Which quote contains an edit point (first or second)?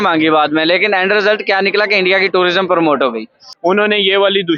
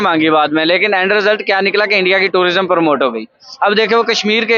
first